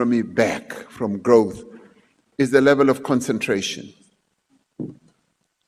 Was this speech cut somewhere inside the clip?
no; 0 cuts

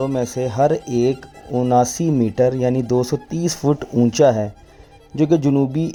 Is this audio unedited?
yes; 0 cuts

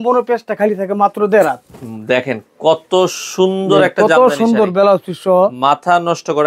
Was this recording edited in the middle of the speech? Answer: no; 0 cuts

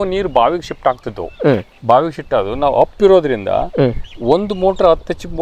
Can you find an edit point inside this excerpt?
no; 0 cuts

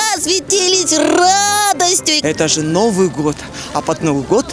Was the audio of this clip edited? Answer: yes; 1 cut; at 2.1 s

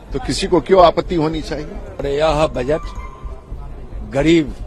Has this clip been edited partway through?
yes; 1 cut; at 2.0 s

